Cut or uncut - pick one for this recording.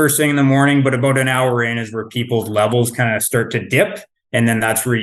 uncut